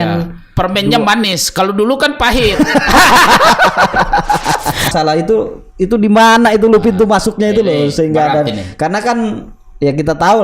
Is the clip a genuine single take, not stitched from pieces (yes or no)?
no